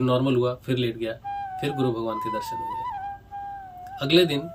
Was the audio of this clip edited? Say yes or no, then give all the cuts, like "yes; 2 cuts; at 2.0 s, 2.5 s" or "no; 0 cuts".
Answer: no; 0 cuts